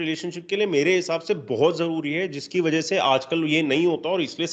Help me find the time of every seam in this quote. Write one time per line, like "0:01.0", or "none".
none